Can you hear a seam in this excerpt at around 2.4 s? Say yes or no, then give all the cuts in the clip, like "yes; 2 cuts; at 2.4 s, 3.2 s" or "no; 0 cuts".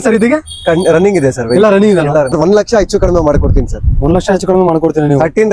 yes; 1 cut; at 2.4 s